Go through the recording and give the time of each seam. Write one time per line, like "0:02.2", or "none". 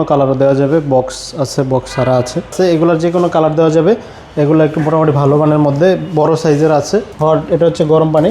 0:02.5
0:07.1